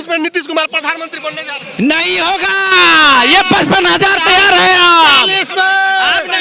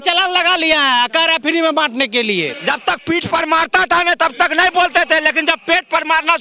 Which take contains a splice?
second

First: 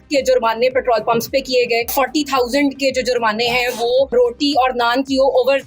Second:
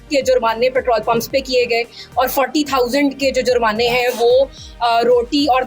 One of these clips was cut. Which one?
first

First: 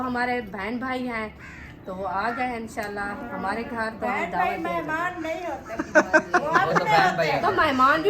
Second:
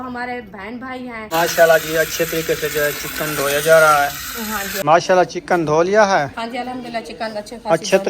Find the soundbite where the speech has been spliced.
second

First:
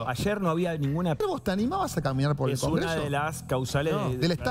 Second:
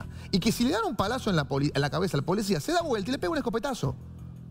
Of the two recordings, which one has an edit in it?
first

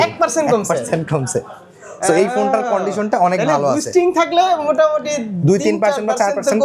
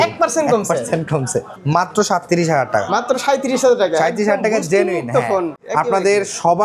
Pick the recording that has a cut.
second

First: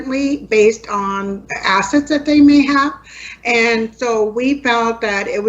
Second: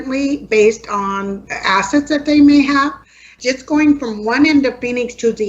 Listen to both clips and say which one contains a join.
second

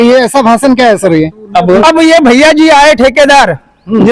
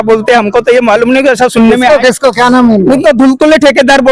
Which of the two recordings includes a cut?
first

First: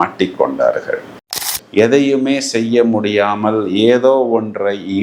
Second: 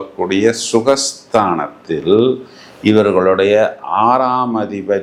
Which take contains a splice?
first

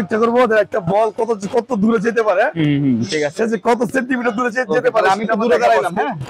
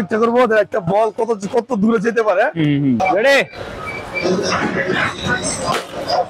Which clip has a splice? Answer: second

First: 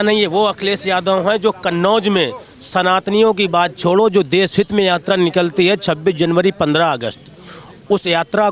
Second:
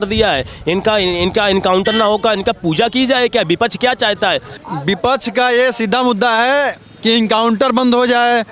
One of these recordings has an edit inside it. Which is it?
second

